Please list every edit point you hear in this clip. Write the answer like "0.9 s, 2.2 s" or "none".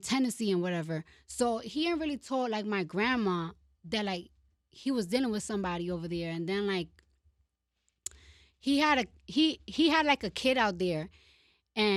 none